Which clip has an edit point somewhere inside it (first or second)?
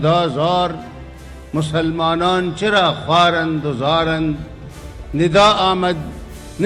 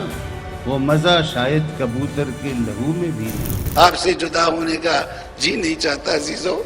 second